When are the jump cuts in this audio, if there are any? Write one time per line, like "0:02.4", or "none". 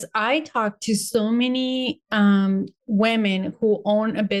none